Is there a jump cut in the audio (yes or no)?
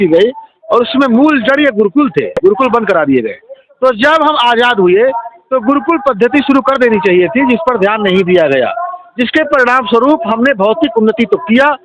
no